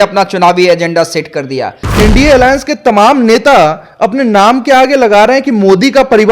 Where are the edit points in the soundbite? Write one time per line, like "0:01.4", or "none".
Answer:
0:01.8